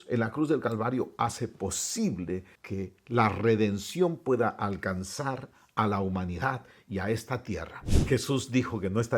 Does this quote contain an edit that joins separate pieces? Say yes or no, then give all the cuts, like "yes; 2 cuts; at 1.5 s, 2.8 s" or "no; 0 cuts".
yes; 2 cuts; at 2.6 s, 7.7 s